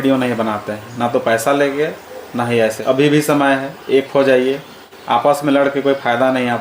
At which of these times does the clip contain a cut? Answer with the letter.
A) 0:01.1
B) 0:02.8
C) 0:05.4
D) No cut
B